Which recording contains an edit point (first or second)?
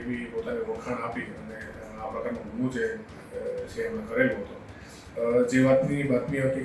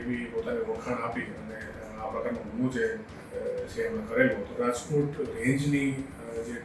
second